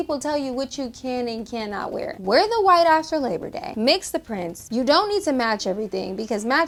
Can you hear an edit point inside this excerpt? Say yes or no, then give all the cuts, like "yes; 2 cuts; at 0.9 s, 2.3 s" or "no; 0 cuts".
no; 0 cuts